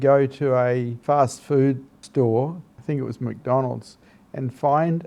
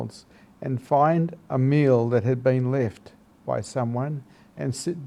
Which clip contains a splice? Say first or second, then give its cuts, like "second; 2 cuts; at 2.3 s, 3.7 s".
first; 3 cuts; at 0.9 s, 1.9 s, 2.7 s